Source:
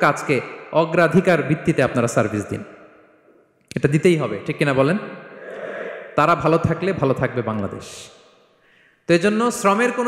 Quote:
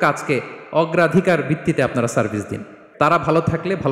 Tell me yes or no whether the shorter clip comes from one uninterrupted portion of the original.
no